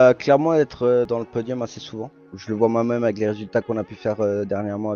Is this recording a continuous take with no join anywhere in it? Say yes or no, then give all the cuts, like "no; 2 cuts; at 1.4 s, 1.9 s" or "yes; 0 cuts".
no; 2 cuts; at 1.1 s, 2.2 s